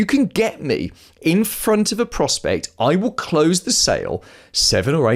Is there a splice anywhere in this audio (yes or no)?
no